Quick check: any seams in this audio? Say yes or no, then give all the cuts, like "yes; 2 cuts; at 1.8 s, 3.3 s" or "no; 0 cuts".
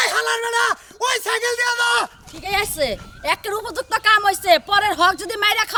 no; 0 cuts